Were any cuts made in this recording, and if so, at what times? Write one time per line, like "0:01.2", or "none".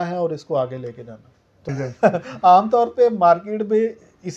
0:01.7